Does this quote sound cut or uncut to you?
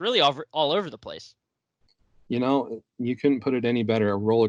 uncut